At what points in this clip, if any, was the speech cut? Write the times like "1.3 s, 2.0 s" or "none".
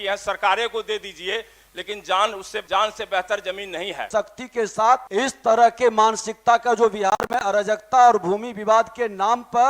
2.6 s, 4.0 s, 5.1 s